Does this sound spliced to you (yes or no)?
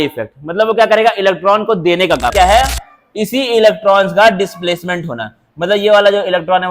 yes